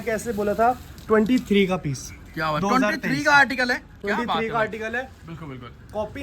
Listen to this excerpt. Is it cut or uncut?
uncut